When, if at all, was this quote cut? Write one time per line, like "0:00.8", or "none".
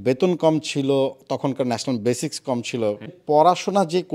0:03.1

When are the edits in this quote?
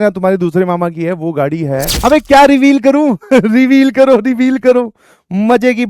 0:01.9

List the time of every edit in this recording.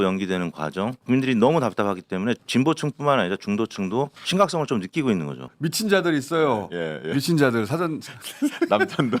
0:01.0
0:02.4
0:04.2
0:05.5

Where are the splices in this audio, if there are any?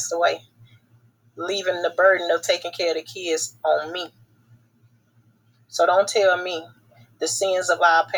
none

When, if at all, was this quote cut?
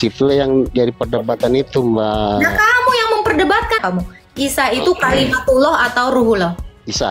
0:03.8

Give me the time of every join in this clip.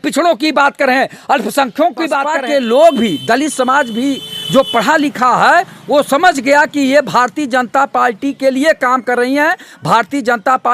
0:02.2

